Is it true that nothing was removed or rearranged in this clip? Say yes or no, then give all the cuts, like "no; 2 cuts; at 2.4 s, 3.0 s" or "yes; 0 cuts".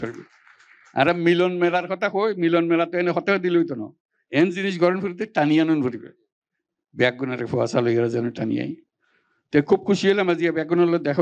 yes; 0 cuts